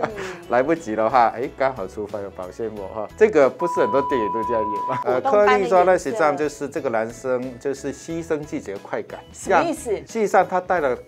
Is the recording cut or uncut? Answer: cut